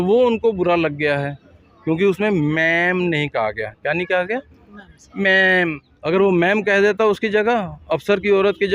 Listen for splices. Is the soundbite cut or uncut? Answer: cut